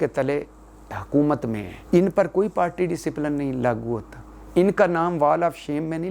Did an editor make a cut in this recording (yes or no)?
yes